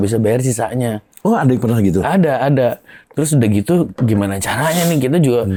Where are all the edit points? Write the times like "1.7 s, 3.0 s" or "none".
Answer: none